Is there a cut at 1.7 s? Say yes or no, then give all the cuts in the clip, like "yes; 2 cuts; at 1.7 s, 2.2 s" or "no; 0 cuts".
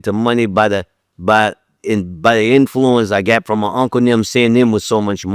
no; 0 cuts